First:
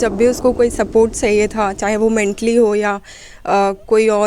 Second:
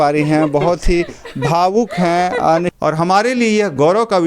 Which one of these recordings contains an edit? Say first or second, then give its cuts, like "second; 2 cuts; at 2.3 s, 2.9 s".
second; 1 cut; at 2.7 s